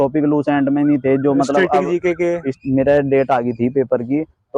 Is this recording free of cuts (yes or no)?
no